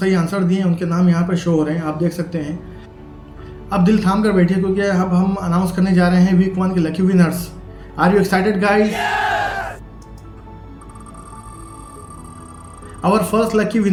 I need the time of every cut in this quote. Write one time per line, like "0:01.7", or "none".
none